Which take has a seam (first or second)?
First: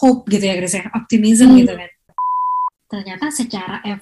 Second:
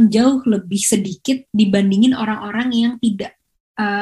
first